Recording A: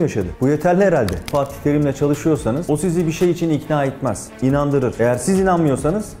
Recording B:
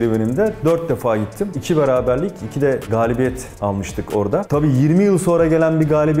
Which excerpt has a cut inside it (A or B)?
A